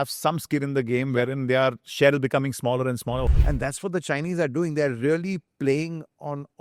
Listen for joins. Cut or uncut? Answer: cut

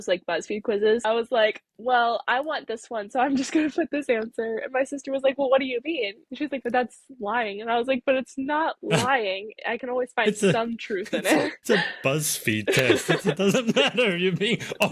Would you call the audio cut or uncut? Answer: cut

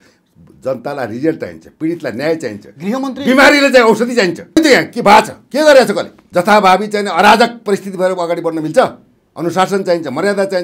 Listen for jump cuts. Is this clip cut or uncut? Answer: cut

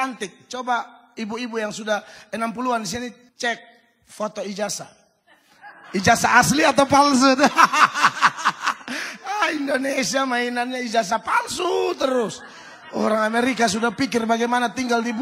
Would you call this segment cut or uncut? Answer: cut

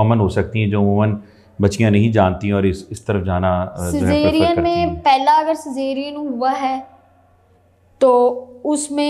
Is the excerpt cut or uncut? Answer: uncut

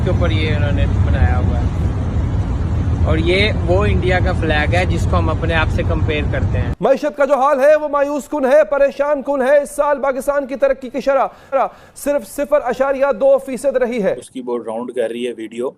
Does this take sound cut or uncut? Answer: cut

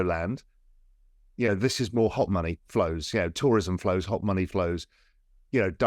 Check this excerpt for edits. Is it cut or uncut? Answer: uncut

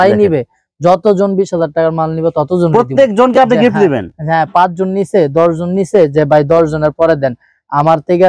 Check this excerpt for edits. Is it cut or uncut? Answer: uncut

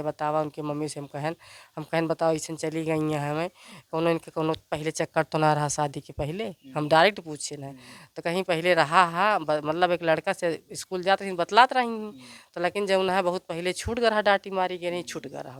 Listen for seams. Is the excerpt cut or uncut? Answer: uncut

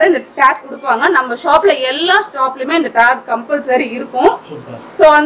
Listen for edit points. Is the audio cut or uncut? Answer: uncut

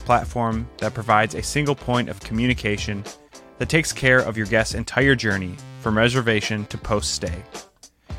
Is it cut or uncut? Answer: uncut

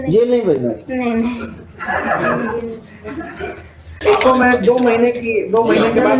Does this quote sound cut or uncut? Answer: cut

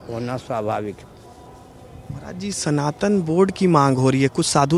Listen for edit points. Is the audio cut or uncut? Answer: uncut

